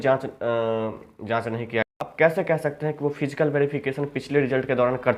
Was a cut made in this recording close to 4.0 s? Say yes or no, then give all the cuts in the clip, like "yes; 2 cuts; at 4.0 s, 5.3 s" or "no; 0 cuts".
no; 1 cut; at 1.9 s